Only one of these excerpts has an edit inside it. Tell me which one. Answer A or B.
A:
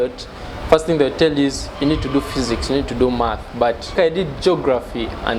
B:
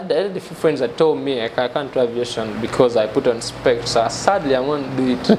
A